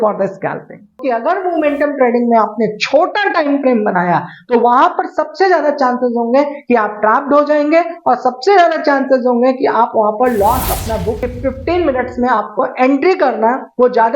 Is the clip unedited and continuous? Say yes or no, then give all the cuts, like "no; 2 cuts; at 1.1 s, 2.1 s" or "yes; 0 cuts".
no; 2 cuts; at 1.0 s, 11.2 s